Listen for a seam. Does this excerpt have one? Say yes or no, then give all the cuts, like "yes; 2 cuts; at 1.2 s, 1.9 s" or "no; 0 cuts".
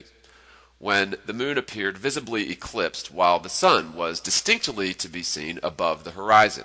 no; 0 cuts